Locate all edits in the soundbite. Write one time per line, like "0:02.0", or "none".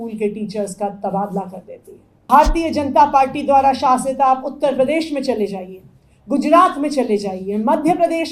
0:02.3